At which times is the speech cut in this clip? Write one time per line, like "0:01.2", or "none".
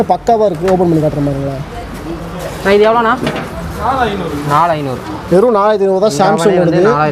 none